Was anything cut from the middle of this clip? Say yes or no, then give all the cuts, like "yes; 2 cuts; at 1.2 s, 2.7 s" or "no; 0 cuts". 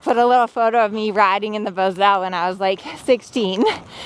no; 0 cuts